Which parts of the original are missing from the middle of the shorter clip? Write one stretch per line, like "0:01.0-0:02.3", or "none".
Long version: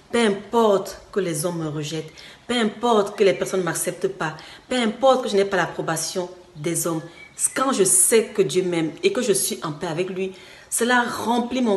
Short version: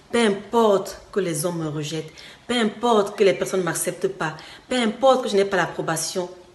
none